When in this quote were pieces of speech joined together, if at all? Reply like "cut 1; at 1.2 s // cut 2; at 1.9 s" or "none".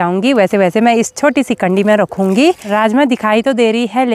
cut 1; at 2.6 s